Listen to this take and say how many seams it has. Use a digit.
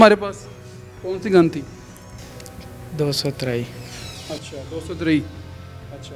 0